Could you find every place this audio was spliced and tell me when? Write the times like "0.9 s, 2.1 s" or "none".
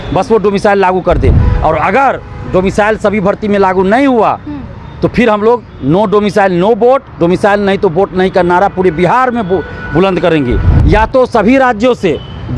1.5 s, 10.7 s